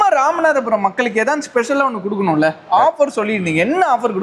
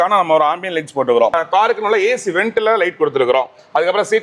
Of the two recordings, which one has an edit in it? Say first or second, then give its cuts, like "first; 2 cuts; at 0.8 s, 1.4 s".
second; 1 cut; at 1.4 s